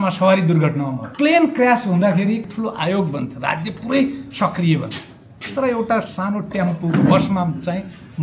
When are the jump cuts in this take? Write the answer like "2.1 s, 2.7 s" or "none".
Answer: 1.0 s, 2.4 s